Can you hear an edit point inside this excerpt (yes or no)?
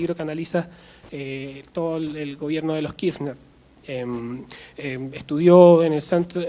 no